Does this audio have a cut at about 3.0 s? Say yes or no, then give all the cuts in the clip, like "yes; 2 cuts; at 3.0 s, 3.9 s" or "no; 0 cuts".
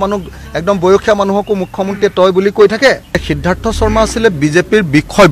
yes; 1 cut; at 3.0 s